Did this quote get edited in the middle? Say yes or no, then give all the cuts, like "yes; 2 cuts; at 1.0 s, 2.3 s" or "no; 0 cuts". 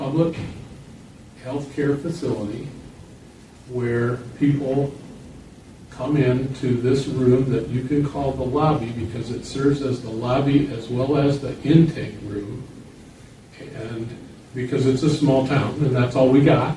no; 0 cuts